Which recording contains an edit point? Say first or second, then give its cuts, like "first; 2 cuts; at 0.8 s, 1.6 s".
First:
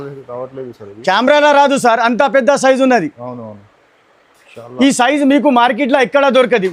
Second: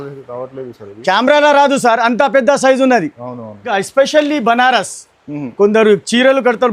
second; 1 cut; at 3.7 s